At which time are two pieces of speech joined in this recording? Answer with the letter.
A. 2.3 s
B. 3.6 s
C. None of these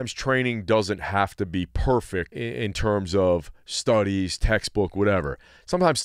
A